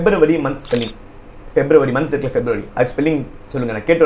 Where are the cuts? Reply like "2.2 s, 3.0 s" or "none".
none